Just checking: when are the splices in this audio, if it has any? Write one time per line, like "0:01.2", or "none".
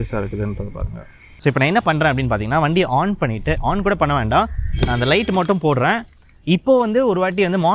0:01.3